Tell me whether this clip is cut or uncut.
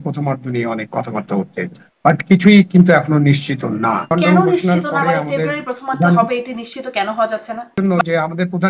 cut